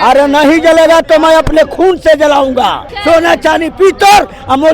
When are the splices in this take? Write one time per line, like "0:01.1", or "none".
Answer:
0:02.9